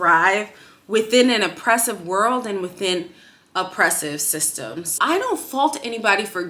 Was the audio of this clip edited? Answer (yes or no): yes